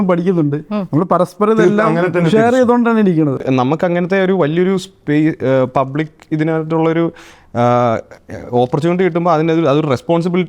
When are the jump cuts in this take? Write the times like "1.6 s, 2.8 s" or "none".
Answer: 3.4 s